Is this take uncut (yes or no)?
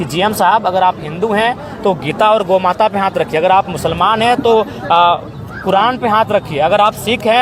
yes